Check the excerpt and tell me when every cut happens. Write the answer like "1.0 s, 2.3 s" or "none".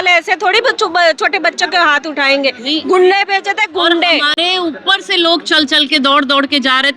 none